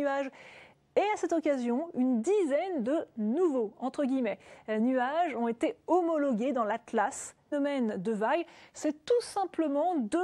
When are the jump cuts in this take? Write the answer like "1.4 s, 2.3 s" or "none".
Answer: none